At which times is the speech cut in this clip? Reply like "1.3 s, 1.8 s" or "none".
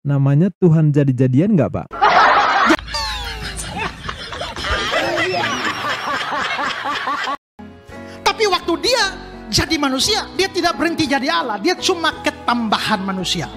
7.3 s